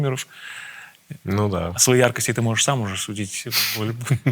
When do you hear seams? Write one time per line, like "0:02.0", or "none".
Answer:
none